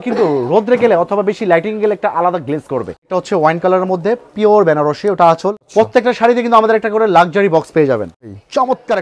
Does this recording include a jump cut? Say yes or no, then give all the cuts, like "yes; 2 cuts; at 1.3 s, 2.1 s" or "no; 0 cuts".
yes; 3 cuts; at 3.1 s, 5.6 s, 8.1 s